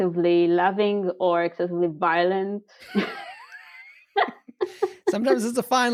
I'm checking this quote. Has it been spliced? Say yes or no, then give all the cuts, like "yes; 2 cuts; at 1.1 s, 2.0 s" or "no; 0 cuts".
no; 0 cuts